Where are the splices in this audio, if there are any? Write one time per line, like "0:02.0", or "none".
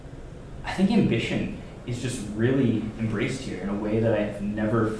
none